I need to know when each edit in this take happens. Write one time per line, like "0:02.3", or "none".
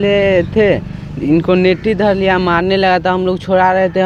none